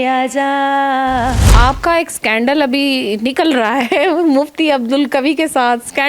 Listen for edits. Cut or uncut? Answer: cut